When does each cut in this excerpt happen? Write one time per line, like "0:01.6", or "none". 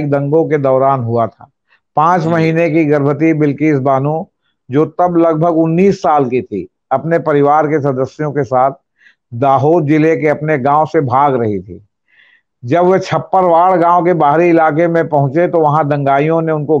none